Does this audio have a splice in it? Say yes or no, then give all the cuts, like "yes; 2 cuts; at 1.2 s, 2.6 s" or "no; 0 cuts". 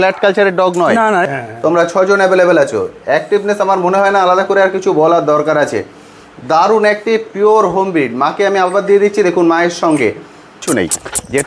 yes; 2 cuts; at 1.2 s, 10.6 s